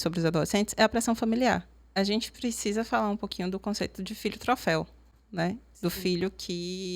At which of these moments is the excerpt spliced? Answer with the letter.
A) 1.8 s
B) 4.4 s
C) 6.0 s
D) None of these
A